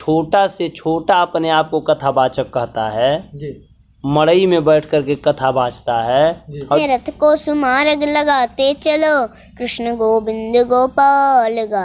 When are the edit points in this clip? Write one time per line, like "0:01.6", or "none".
0:06.8